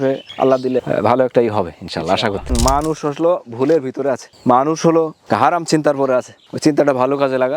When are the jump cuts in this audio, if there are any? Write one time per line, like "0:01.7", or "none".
0:02.5